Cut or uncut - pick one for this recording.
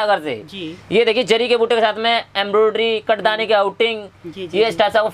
uncut